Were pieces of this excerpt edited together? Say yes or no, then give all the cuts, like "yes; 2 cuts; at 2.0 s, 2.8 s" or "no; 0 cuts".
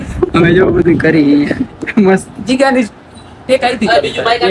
no; 0 cuts